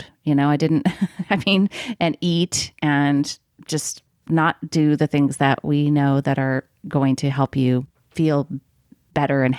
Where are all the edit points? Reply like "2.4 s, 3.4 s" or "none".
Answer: 8.0 s